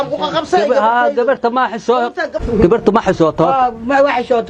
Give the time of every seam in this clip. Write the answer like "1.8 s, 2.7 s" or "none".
2.3 s